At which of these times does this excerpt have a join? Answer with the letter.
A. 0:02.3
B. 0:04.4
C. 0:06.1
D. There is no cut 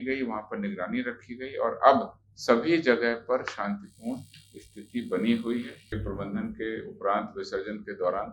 C